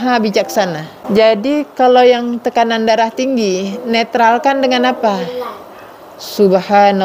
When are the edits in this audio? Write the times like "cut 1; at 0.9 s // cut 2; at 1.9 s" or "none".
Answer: cut 1; at 1.0 s